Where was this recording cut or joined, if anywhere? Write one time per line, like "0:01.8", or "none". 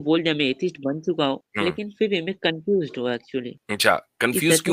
0:01.5
0:03.6